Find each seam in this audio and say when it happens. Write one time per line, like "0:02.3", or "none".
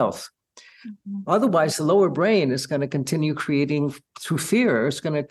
none